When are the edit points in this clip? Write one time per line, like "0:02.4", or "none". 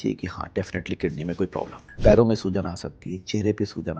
0:01.8

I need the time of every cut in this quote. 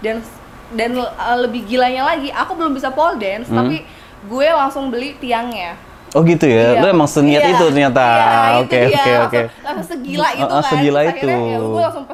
none

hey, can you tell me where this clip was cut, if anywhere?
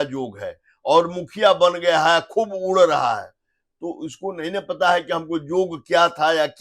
none

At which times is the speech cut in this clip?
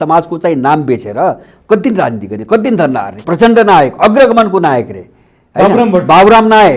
0:03.2

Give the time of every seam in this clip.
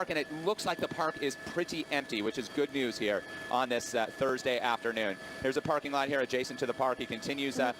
0:01.3

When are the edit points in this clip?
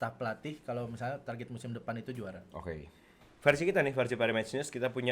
0:03.2

